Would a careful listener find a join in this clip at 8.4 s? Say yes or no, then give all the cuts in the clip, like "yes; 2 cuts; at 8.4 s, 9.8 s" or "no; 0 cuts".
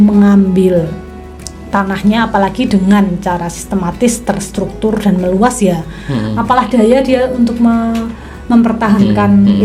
no; 0 cuts